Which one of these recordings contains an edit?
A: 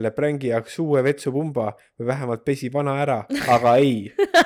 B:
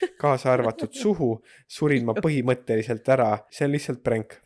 B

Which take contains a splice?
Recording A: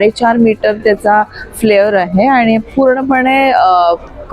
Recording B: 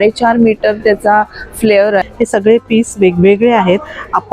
B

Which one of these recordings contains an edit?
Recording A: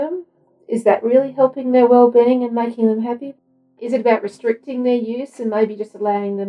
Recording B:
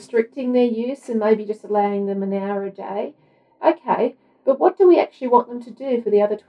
A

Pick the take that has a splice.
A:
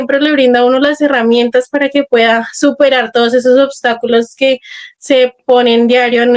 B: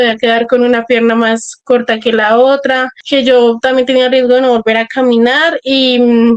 B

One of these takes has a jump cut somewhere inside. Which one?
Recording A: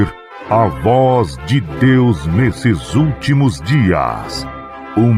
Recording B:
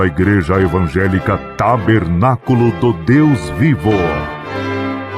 B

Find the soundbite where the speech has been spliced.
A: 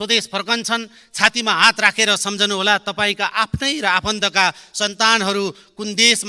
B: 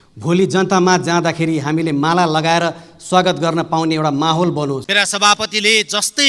B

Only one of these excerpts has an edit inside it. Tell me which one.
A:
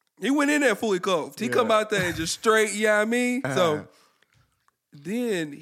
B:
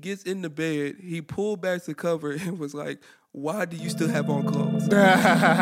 A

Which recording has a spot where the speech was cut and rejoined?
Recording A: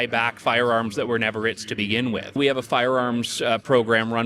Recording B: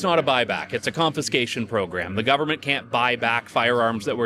A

